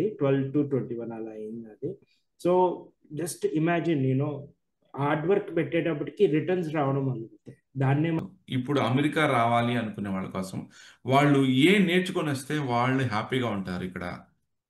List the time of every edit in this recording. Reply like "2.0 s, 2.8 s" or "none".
8.2 s